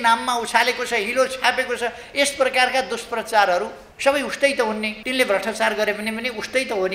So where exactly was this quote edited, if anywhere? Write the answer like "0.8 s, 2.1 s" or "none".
3.8 s, 5.0 s